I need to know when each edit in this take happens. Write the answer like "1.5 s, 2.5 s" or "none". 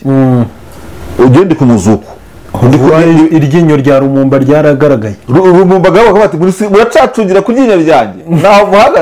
none